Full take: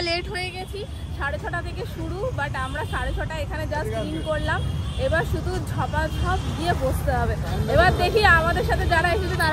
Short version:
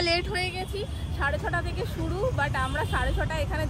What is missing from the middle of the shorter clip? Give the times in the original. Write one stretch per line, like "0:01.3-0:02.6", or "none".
none